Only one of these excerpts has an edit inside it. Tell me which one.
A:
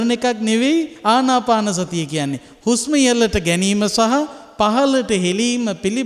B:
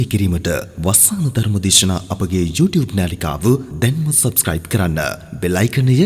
A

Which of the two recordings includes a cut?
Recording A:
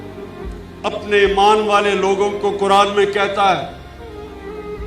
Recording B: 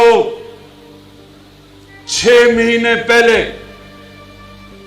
A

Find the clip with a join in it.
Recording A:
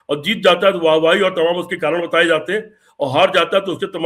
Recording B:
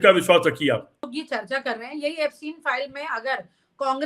B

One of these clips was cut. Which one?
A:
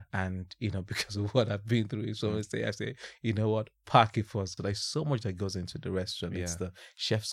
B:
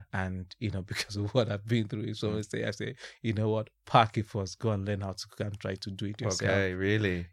A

